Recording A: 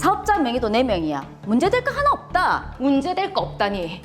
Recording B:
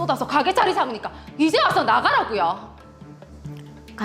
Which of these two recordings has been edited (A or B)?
A